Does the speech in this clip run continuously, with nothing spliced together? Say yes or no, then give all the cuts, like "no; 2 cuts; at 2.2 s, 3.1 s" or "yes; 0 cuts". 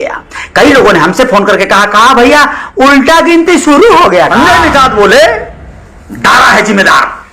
no; 1 cut; at 4.3 s